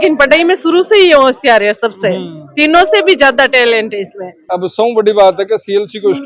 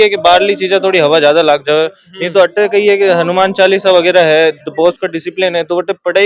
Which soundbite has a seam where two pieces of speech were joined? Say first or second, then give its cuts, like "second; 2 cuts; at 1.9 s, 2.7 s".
first; 1 cut; at 4.4 s